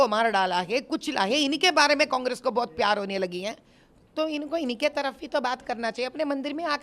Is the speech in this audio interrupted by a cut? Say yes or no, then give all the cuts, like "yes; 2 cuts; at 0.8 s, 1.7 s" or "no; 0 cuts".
no; 0 cuts